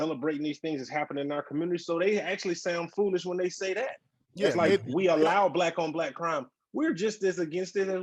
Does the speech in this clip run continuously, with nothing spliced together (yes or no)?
yes